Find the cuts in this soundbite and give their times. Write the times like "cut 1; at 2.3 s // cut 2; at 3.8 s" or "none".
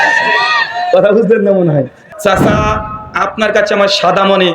cut 1; at 2.1 s